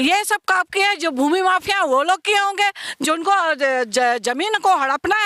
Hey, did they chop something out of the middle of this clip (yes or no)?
no